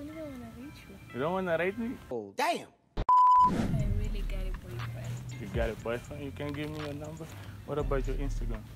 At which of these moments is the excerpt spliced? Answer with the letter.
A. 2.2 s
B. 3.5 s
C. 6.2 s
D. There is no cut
B